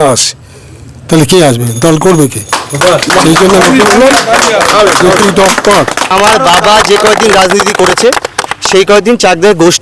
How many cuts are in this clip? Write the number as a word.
one